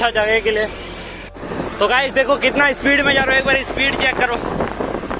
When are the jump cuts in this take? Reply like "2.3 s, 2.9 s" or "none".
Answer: 1.3 s